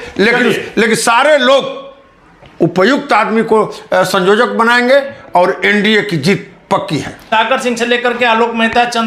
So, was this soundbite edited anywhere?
yes; 1 cut; at 7.2 s

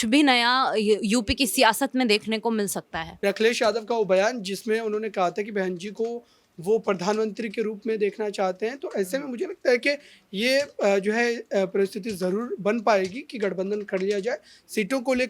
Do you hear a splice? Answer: yes; 1 cut; at 3.0 s

